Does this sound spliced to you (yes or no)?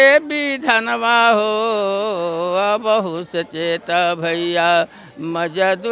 no